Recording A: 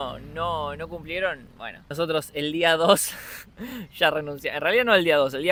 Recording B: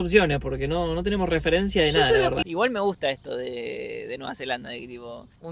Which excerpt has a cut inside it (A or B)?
B